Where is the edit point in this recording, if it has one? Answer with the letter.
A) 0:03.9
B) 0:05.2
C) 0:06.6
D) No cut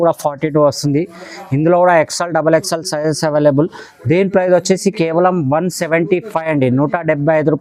D